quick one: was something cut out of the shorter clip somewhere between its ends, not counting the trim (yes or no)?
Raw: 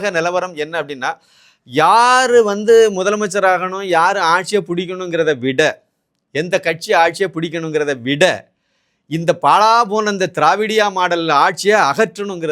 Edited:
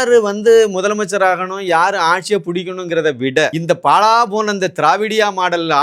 yes